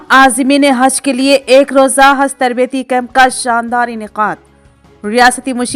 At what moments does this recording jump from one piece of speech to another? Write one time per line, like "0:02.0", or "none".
none